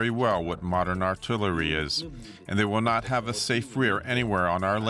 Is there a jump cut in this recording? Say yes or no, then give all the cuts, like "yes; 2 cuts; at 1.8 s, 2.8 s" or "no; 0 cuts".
no; 0 cuts